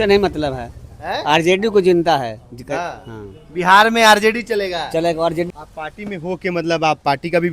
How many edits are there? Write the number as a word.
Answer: one